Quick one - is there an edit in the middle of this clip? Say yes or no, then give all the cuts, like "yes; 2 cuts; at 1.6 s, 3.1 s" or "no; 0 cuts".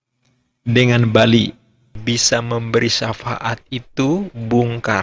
yes; 1 cut; at 1.8 s